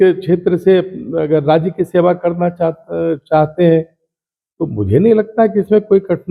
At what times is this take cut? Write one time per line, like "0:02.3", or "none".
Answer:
none